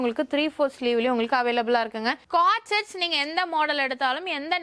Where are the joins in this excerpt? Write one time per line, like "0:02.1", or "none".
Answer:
0:02.2